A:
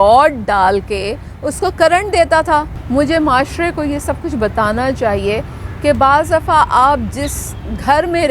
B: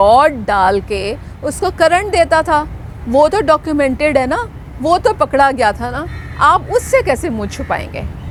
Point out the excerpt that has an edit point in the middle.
A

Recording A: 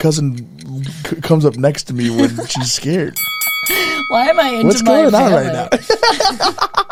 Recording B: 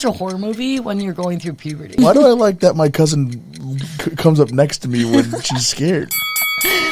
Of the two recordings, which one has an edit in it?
B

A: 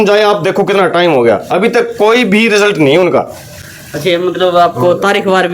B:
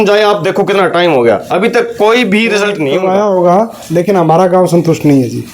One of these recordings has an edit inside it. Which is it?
B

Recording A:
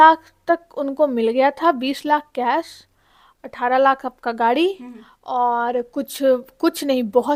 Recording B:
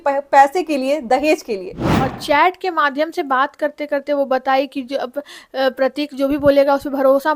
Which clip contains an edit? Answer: B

